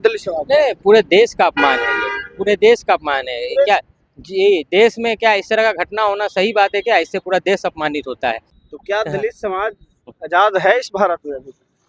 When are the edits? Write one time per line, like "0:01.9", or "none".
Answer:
0:08.5